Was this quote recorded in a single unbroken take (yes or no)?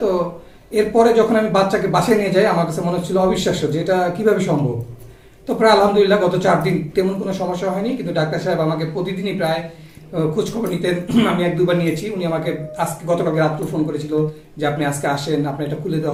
yes